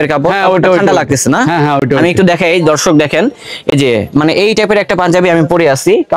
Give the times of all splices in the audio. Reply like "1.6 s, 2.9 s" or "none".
none